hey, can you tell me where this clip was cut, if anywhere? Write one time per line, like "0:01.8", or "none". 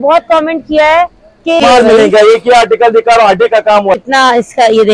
0:01.6
0:04.0